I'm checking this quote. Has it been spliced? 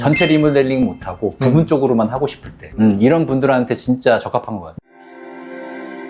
no; 0 cuts

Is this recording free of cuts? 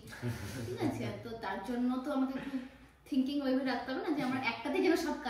yes; 0 cuts

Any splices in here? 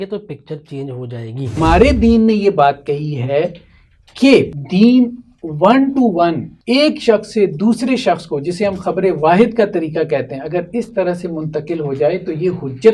yes; 3 cuts; at 1.6 s, 4.6 s, 6.5 s

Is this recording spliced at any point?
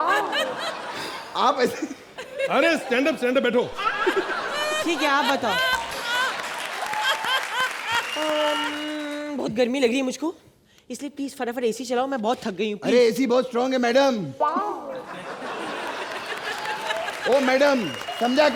no; 0 cuts

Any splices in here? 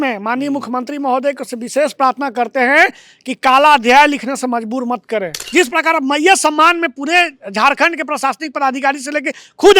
yes; 1 cut; at 5.4 s

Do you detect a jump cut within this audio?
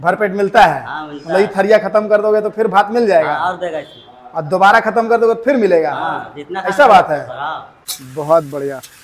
yes; 1 cut; at 7.8 s

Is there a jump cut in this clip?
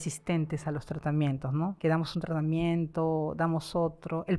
yes; 1 cut; at 1.8 s

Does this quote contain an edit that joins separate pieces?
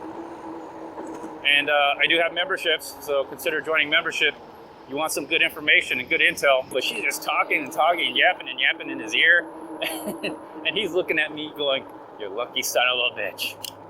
yes; 1 cut; at 6.7 s

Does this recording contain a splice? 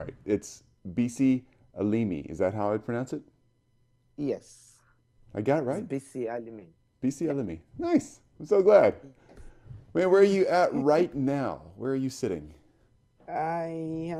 no; 0 cuts

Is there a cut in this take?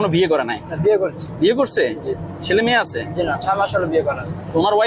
no; 0 cuts

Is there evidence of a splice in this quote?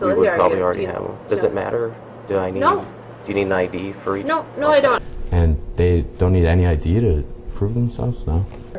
no; 0 cuts

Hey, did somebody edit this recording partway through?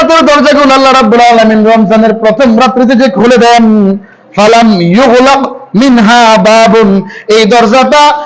no; 0 cuts

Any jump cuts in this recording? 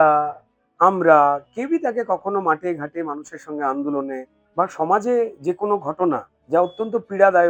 yes; 2 cuts; at 4.4 s, 6.3 s

